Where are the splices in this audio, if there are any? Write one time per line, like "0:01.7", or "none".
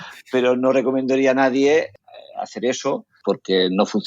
0:01.9
0:03.2